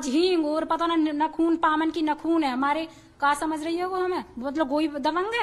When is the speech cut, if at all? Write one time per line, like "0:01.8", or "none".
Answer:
none